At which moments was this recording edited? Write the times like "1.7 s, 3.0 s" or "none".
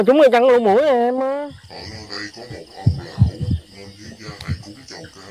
1.4 s